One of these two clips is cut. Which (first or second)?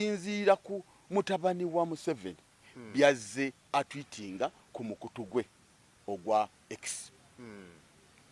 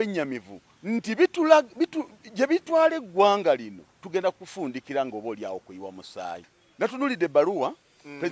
second